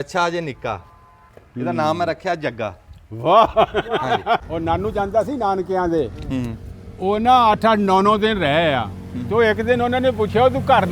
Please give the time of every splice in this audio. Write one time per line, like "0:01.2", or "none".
0:04.5